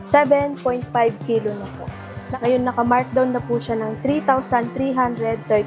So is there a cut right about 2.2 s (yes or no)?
yes